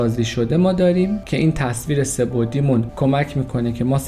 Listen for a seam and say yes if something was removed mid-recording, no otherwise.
yes